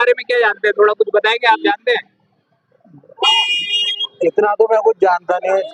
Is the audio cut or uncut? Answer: uncut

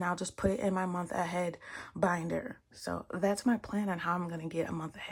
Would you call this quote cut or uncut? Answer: uncut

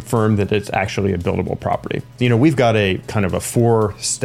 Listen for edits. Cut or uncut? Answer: cut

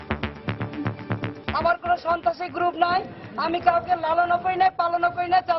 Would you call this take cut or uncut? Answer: cut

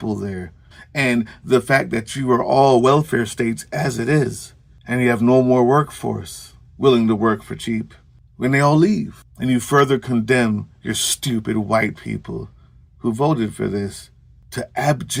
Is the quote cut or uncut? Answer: uncut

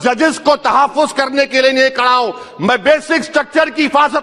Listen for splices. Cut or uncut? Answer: uncut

